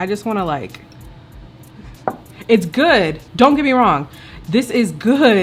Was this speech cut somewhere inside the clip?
no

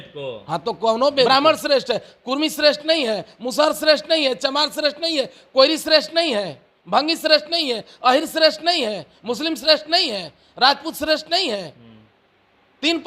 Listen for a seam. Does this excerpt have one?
yes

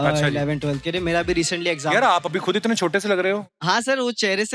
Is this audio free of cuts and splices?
no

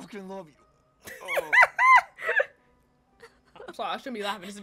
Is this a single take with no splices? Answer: yes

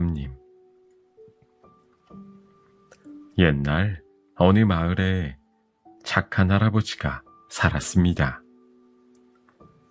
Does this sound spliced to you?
no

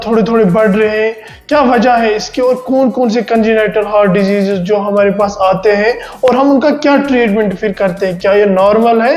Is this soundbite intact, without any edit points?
yes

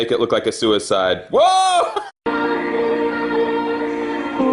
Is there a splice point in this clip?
no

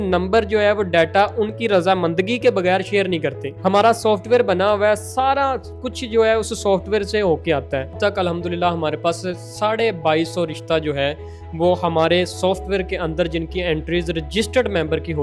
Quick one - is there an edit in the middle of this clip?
yes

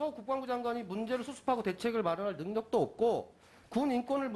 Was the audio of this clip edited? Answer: no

